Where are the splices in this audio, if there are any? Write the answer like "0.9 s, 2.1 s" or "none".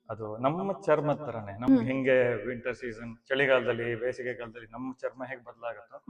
none